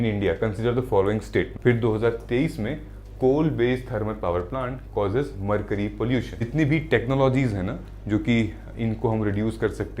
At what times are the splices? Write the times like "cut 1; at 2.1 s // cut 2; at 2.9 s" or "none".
cut 1; at 1.5 s // cut 2; at 6.5 s